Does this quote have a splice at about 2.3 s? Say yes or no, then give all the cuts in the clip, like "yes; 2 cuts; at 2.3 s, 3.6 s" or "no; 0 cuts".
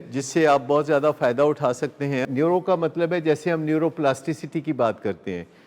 yes; 1 cut; at 2.3 s